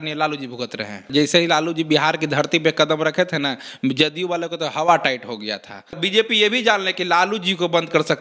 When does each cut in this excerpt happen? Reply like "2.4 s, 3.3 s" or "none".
1.0 s, 6.0 s